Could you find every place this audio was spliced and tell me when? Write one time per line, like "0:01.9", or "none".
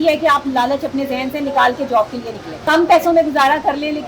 0:02.7